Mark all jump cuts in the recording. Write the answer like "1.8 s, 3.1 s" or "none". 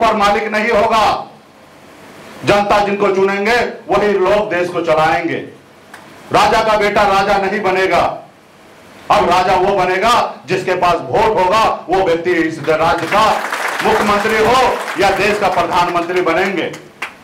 none